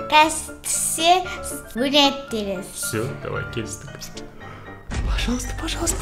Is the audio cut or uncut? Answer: cut